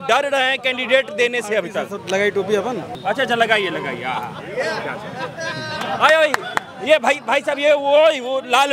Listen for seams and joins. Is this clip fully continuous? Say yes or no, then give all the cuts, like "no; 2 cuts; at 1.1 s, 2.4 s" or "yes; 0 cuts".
no; 1 cut; at 2.9 s